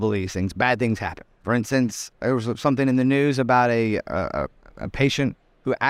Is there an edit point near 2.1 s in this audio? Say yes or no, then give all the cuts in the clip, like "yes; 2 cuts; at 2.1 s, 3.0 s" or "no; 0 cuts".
yes; 2 cuts; at 1.3 s, 2.1 s